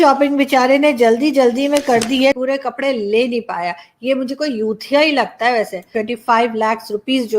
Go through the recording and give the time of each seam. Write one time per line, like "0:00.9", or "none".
0:02.3
0:05.9